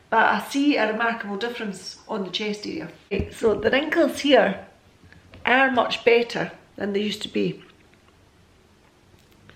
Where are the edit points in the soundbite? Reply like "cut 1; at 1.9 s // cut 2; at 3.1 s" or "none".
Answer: none